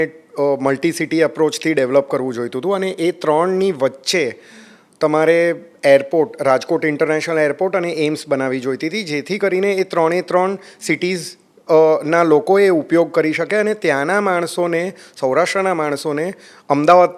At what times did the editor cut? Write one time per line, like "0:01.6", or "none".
none